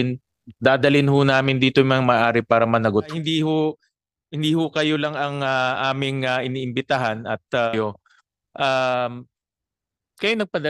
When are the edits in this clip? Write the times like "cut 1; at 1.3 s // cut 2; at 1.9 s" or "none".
cut 1; at 3.1 s // cut 2; at 7.7 s